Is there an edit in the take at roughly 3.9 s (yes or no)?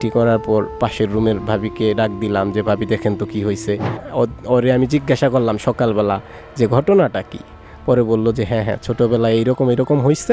yes